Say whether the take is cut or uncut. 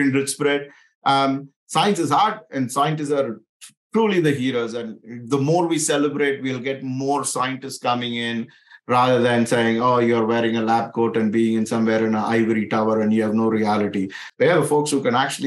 uncut